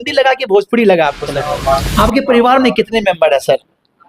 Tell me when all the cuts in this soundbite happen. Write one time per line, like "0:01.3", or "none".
0:01.4